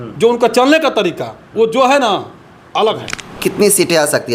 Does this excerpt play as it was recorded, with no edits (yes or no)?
no